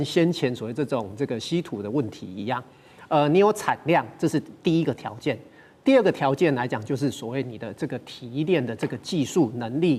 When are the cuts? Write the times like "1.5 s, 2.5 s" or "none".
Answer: none